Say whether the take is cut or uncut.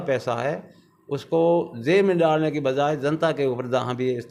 uncut